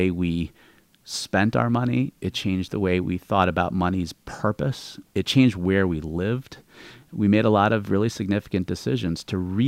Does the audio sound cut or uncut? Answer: cut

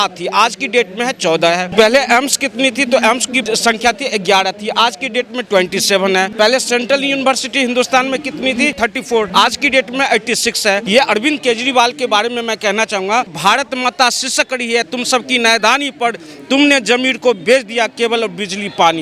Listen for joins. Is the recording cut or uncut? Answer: cut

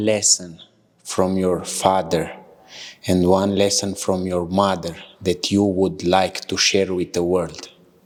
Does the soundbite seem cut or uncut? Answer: uncut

